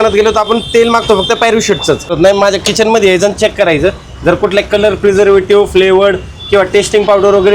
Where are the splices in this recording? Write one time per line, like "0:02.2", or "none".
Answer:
0:02.1